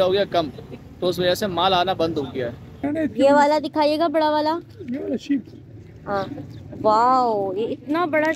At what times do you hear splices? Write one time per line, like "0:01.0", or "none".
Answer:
0:02.8